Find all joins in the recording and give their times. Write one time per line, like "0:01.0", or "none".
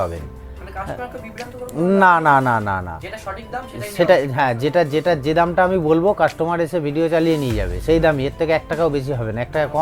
none